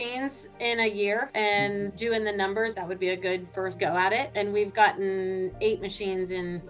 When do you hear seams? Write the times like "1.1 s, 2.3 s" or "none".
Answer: none